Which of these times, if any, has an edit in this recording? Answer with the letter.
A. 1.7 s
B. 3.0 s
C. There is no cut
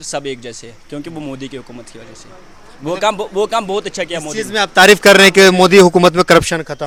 C